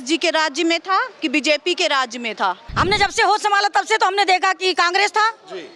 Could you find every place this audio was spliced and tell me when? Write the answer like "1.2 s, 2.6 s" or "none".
2.7 s